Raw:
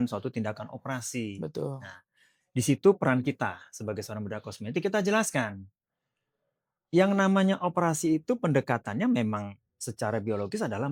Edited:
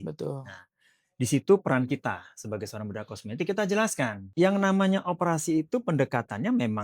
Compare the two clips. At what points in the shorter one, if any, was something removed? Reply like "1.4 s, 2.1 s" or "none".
4.2 s